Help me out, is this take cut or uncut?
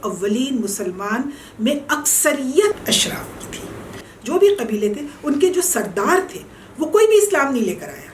cut